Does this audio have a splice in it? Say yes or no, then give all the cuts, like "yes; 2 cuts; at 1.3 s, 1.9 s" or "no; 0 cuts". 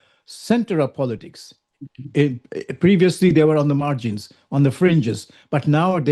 no; 0 cuts